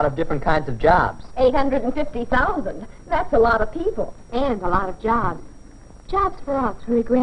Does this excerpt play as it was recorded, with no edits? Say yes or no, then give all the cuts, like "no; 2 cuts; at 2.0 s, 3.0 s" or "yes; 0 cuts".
no; 1 cut; at 4.2 s